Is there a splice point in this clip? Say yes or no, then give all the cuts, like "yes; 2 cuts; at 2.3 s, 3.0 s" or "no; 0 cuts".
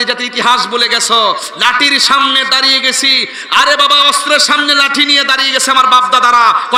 no; 0 cuts